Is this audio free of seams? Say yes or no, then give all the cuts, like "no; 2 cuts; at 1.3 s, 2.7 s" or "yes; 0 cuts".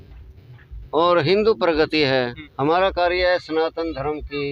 no; 1 cut; at 2.4 s